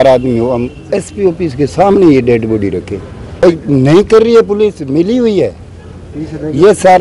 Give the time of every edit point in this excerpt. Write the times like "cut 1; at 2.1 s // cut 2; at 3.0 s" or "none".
cut 1; at 3.4 s